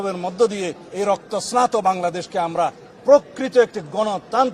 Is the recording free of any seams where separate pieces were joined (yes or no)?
yes